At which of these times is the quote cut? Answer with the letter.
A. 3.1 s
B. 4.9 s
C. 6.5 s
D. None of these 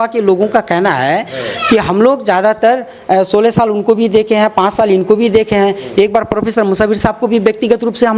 D